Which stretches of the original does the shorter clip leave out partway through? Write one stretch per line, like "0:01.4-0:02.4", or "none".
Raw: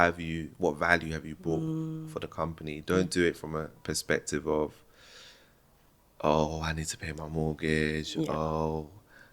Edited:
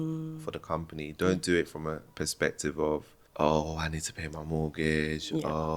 0:04.9-0:06.0